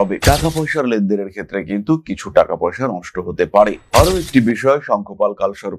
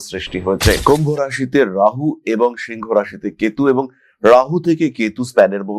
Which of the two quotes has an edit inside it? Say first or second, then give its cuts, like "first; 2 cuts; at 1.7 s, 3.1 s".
first; 1 cut; at 3.8 s